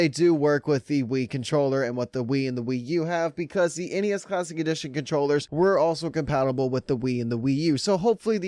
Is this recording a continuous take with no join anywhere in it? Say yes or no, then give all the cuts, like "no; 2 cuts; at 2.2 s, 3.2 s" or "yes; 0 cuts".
yes; 0 cuts